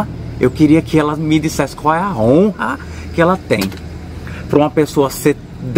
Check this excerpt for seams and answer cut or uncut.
uncut